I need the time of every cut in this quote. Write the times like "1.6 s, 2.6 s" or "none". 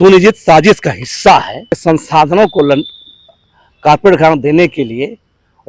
1.8 s

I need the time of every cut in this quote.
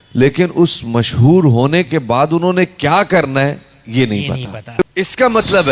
4.6 s

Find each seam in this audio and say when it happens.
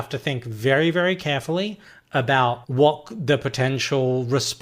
2.6 s

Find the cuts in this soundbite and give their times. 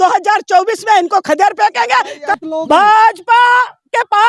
2.3 s

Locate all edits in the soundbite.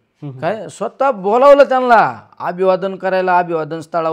none

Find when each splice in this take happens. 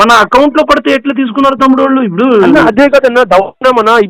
none

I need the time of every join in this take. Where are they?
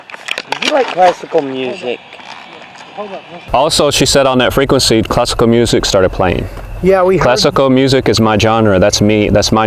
3.4 s

